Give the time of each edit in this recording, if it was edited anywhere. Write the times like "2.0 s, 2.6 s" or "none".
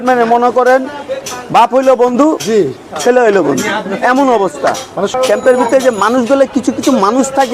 5.1 s